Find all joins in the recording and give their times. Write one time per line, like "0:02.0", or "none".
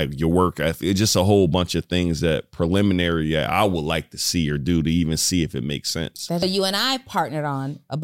0:06.4